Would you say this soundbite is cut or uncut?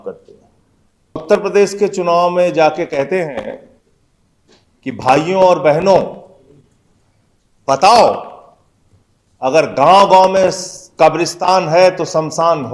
cut